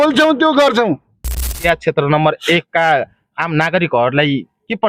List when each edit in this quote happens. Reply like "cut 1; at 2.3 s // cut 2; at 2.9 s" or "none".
cut 1; at 1.6 s